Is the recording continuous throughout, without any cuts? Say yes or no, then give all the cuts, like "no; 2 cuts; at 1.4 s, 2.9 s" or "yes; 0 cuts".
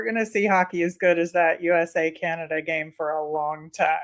yes; 0 cuts